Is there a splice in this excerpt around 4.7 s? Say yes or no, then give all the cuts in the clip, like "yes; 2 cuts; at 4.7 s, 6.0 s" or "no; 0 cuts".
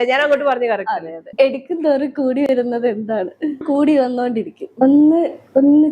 yes; 3 cuts; at 1.2 s, 3.6 s, 4.7 s